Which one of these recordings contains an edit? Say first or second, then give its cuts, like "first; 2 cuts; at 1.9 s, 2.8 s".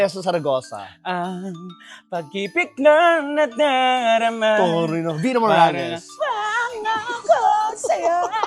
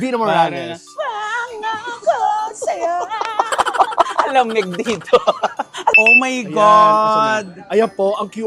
second; 1 cut; at 5.9 s